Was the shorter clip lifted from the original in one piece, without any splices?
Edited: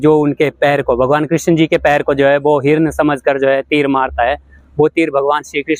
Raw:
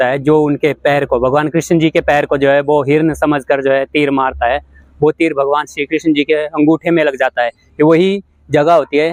yes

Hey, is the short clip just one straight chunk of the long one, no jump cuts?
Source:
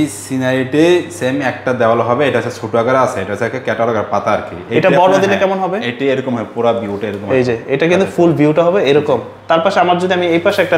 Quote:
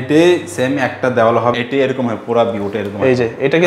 no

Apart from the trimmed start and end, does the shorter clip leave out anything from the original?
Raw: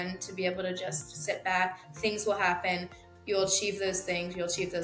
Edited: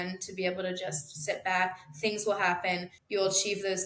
yes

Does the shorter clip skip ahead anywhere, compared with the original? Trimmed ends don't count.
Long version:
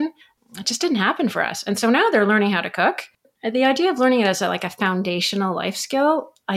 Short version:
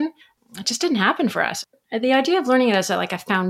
yes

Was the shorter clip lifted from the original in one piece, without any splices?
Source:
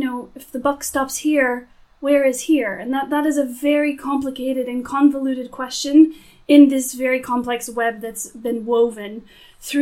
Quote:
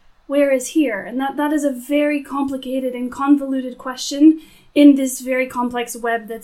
yes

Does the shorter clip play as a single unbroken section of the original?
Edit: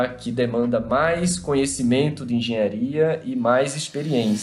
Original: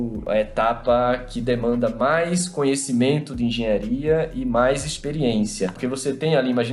yes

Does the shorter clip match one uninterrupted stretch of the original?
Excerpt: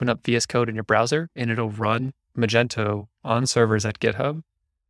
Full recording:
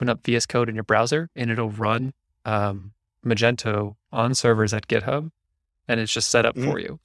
no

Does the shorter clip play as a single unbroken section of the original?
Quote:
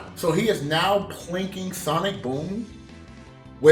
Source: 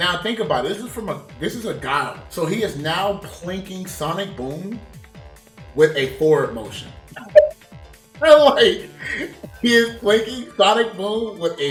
yes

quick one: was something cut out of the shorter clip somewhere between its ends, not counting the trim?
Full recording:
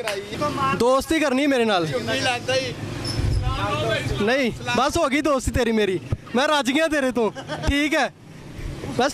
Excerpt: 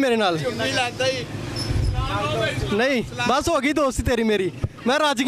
no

